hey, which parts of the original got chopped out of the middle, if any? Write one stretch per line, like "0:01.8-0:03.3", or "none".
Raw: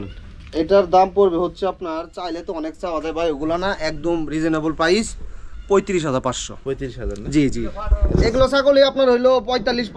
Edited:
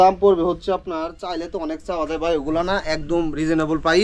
none